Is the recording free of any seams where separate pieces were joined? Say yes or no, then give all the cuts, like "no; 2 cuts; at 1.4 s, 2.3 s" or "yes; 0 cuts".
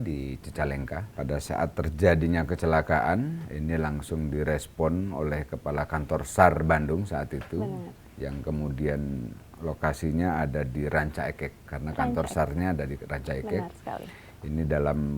no; 2 cuts; at 1.1 s, 3.5 s